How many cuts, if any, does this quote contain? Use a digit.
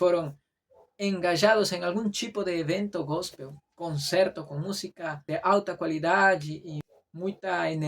2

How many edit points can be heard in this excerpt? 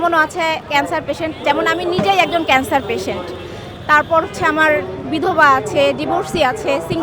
0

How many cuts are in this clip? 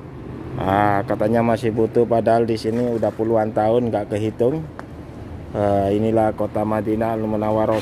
0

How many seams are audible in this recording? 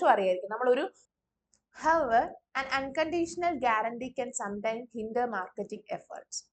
1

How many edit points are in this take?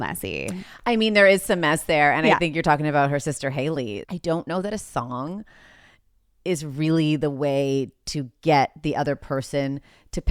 1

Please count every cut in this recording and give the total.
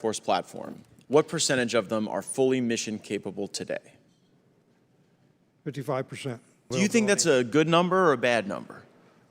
2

